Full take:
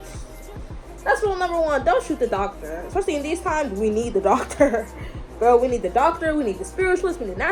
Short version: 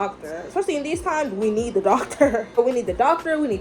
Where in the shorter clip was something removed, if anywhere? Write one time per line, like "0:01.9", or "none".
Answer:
0:02.6